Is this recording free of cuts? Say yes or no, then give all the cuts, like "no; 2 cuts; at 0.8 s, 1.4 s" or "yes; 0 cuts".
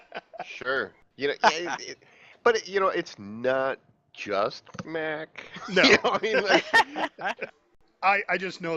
no; 1 cut; at 7.4 s